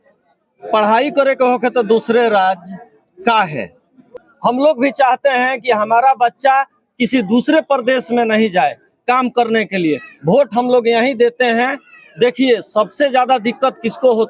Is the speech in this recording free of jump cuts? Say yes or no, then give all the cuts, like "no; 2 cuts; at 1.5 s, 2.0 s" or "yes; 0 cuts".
no; 1 cut; at 4.2 s